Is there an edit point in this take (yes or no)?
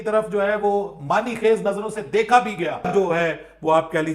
yes